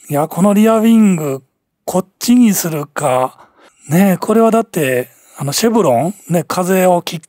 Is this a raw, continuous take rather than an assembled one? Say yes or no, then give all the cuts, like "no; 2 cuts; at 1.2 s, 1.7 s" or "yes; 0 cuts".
yes; 0 cuts